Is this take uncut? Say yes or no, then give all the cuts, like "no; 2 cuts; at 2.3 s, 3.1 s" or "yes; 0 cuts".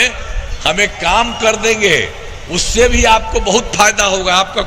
yes; 0 cuts